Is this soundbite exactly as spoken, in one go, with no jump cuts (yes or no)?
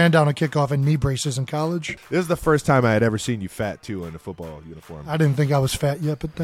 no